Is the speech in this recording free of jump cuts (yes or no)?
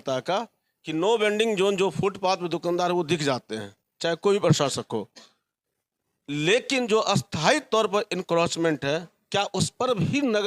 yes